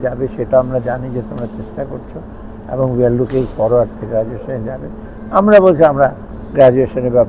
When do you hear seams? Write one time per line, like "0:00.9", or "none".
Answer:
none